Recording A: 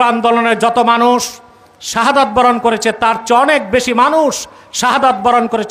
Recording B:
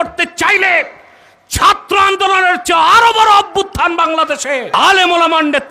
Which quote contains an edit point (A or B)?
B